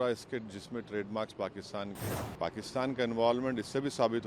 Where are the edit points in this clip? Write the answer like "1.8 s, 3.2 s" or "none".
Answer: 2.0 s